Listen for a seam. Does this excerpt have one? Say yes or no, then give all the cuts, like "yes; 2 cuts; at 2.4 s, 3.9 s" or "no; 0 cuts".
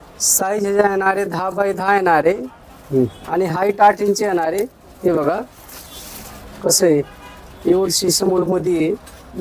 no; 0 cuts